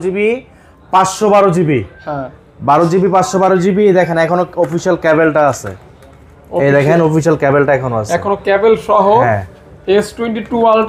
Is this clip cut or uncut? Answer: uncut